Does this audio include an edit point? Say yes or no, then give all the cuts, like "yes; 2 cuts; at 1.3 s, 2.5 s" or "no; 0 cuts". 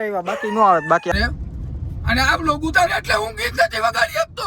yes; 1 cut; at 1.1 s